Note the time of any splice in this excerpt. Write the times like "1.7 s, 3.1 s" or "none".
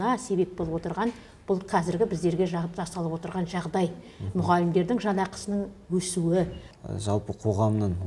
6.7 s